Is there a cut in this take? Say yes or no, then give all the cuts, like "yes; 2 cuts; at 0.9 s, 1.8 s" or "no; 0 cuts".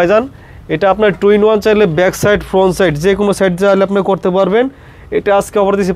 no; 0 cuts